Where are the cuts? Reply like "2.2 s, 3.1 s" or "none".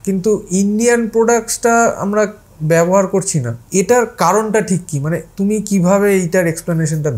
3.6 s